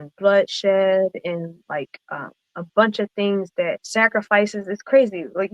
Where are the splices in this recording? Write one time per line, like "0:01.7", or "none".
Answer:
0:03.8